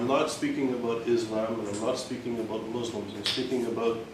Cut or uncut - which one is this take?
uncut